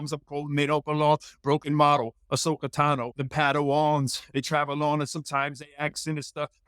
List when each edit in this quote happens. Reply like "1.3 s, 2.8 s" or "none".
3.2 s, 4.2 s